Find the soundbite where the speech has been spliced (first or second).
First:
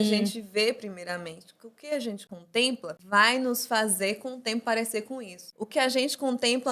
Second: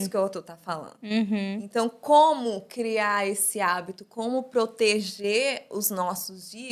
first